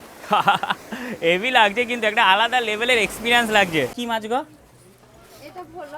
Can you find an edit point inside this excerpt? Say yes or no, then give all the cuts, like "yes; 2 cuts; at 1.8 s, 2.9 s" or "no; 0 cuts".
yes; 1 cut; at 4.0 s